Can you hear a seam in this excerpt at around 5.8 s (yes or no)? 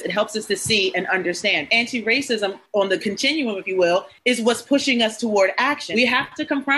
yes